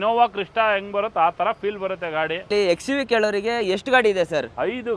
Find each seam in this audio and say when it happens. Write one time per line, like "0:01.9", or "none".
0:02.5

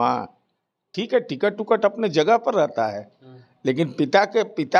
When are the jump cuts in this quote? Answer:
0:00.9

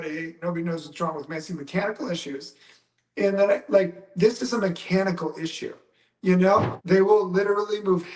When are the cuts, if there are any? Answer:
0:06.8

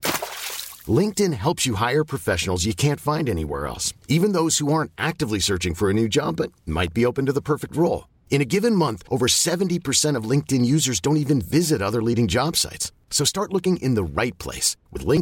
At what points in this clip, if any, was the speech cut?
none

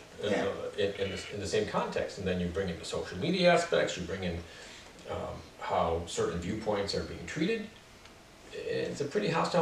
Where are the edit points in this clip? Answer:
none

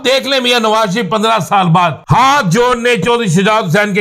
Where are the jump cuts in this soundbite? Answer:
0:02.0

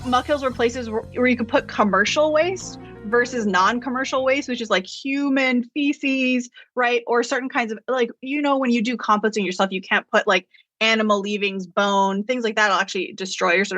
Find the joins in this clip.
0:01.1

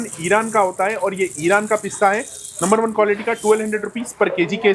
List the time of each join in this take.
none

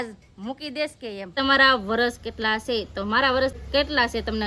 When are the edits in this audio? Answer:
0:01.3
0:03.6

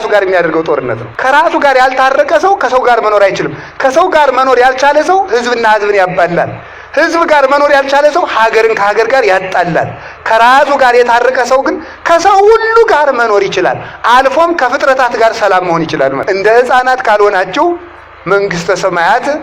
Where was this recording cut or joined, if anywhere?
0:01.1
0:16.2

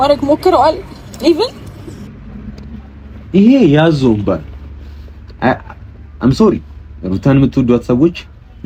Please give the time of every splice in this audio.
none

